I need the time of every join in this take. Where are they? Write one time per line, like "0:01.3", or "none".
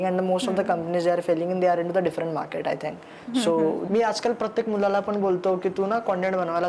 0:03.8